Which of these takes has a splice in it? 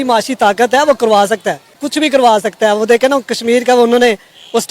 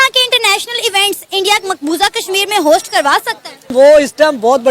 first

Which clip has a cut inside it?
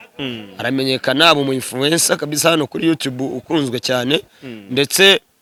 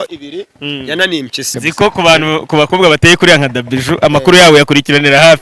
second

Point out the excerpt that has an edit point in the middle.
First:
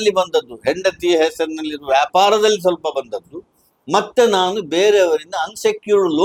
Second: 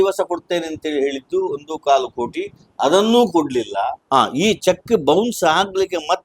second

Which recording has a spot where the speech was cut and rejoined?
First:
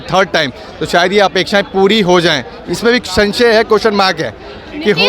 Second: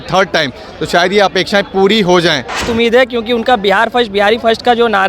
second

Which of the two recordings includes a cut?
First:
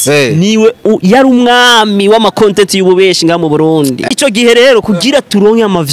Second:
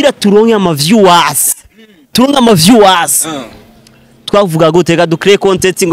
first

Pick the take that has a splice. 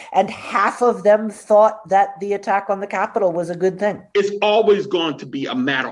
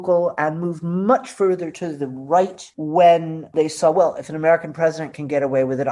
first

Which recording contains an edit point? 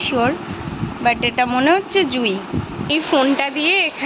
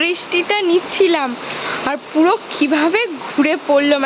first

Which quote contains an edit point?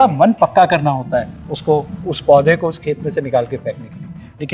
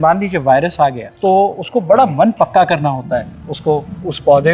second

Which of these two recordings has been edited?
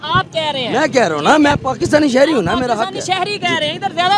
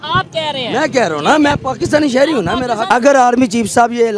second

